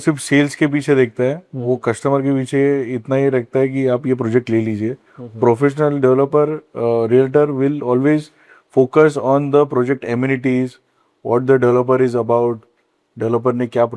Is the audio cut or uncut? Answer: uncut